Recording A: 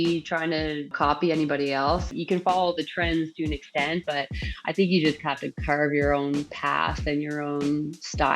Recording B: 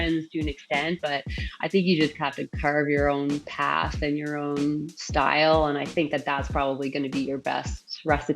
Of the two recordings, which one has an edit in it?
A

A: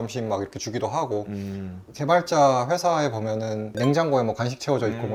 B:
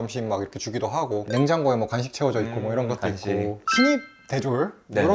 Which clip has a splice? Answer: B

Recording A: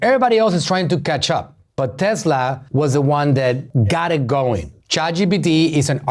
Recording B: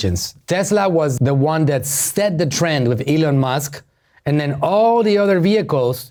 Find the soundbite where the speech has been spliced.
A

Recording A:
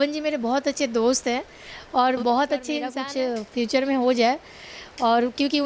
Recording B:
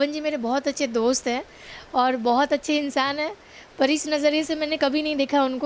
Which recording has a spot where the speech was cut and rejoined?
A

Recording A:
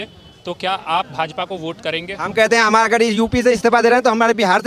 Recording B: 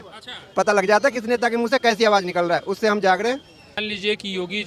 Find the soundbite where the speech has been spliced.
B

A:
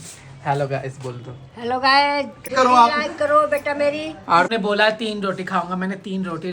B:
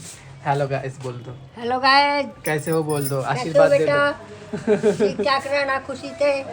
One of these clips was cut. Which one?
A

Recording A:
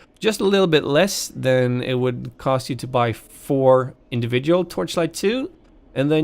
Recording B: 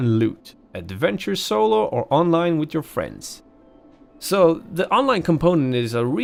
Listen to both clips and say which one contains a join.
A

